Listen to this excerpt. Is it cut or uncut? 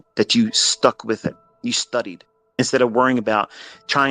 cut